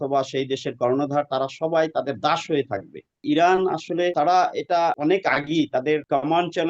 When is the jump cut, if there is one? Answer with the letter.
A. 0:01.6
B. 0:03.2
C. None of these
B